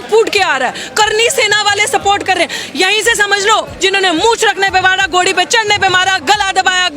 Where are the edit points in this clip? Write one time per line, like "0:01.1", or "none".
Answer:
0:03.7